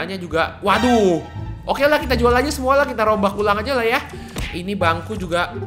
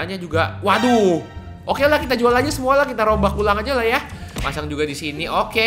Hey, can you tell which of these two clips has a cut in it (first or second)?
second